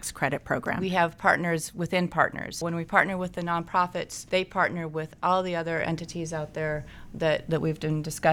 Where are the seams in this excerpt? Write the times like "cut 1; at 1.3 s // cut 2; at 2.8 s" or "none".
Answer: cut 1; at 0.8 s // cut 2; at 2.6 s // cut 3; at 4.2 s